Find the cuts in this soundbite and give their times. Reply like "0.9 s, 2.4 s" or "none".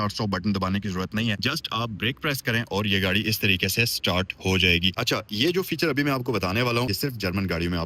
1.4 s, 4.9 s, 6.9 s